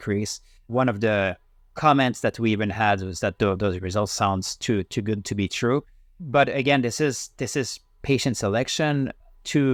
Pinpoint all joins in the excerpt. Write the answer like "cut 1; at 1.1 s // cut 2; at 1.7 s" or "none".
none